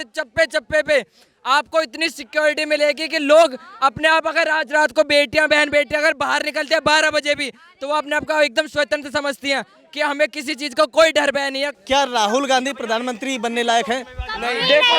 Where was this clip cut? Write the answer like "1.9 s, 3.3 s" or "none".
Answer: 11.7 s